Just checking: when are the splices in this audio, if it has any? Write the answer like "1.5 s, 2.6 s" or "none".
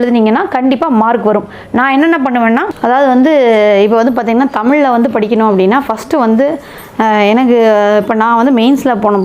2.8 s